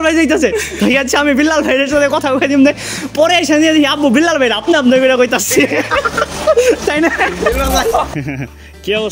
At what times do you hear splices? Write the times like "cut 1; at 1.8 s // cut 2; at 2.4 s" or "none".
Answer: cut 1; at 8.1 s